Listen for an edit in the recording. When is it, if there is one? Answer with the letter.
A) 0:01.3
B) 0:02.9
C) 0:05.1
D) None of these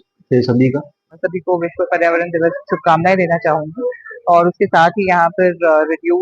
A